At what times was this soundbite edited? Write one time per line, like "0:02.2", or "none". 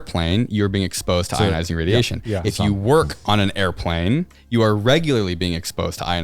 none